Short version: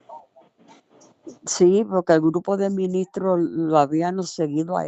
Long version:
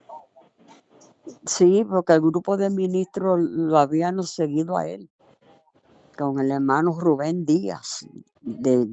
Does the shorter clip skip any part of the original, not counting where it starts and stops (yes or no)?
no